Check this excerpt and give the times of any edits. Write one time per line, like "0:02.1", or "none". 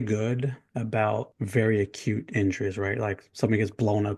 0:01.4